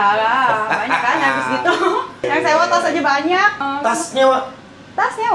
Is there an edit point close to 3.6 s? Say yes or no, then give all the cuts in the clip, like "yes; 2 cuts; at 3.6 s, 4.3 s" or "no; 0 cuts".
yes; 2 cuts; at 2.3 s, 3.6 s